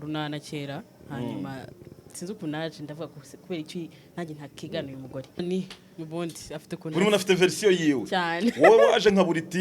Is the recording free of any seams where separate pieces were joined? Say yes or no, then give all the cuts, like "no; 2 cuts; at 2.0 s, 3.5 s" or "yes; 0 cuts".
no; 1 cut; at 5.4 s